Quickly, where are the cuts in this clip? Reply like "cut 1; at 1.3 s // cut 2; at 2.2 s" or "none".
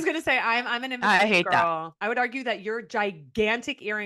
cut 1; at 1.9 s